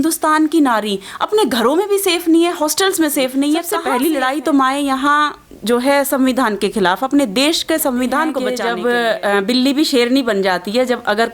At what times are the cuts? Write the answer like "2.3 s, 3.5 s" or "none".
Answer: 3.8 s, 8.5 s